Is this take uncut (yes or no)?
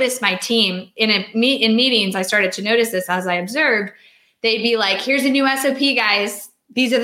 yes